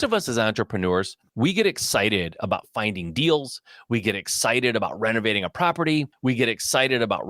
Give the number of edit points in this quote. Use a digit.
2